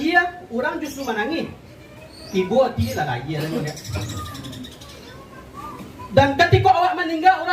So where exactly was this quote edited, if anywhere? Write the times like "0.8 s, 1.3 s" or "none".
none